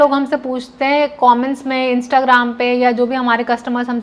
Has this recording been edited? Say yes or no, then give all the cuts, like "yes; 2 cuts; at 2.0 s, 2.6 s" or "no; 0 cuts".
no; 0 cuts